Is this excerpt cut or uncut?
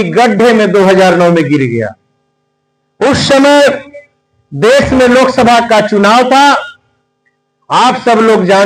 uncut